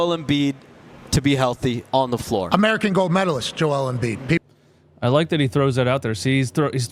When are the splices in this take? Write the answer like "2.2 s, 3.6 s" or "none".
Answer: none